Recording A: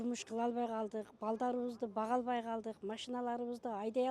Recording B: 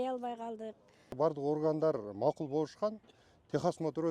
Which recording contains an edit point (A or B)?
B